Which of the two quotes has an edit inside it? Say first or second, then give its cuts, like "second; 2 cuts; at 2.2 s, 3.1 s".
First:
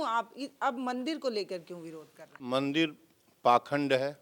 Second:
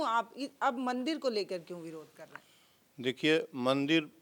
first; 1 cut; at 2.4 s